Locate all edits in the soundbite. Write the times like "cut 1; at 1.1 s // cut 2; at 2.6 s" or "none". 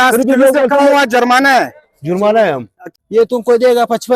cut 1; at 2.8 s